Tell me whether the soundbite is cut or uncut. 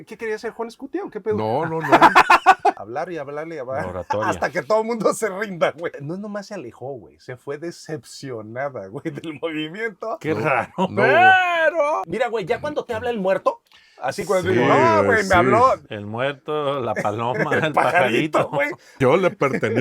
cut